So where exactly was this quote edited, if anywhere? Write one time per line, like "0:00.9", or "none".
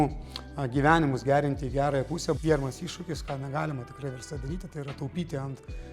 0:02.4